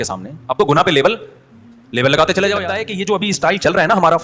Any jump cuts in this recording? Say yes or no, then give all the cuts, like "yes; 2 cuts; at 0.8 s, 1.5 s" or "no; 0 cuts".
yes; 1 cut; at 2.8 s